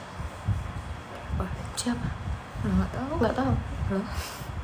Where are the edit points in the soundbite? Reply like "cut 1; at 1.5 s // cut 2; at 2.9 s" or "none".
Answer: none